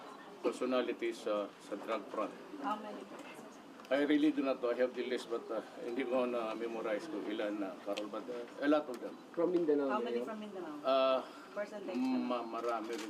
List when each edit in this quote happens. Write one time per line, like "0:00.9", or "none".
0:11.4